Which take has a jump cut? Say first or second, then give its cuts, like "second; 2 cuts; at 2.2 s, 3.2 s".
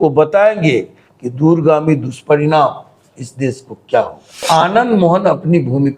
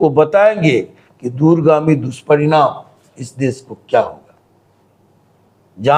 first; 1 cut; at 4.4 s